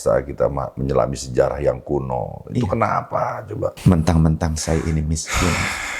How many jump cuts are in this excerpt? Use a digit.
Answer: 1